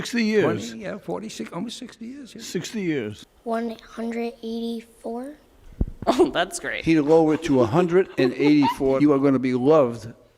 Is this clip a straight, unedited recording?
no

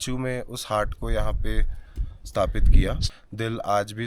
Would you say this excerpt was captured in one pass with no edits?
no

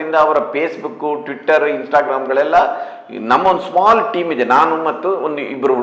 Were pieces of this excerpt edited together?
no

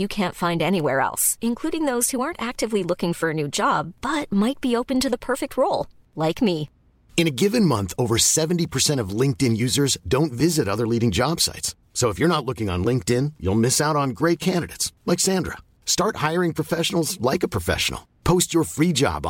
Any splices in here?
no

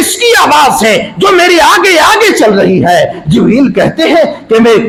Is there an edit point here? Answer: no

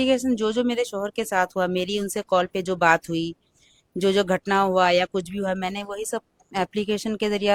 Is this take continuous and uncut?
yes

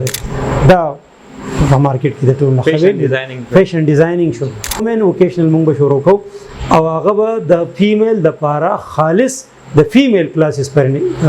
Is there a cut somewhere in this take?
yes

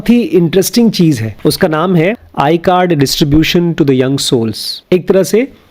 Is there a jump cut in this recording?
yes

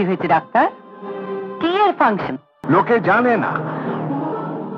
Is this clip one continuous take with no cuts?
no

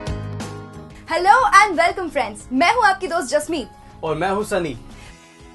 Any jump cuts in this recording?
yes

